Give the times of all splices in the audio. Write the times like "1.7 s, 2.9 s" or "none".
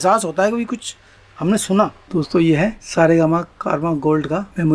2.1 s